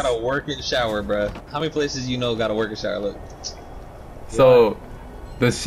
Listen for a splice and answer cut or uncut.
cut